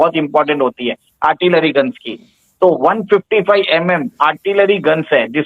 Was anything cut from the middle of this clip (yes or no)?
no